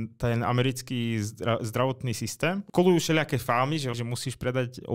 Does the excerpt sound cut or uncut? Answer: cut